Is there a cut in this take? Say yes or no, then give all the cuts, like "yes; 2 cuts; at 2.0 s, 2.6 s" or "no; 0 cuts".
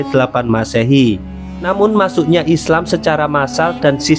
yes; 1 cut; at 1.7 s